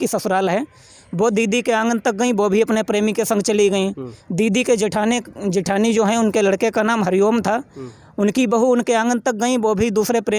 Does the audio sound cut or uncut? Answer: uncut